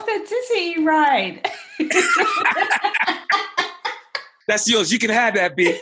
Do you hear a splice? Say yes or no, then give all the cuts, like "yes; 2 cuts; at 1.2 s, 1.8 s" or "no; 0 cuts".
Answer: no; 0 cuts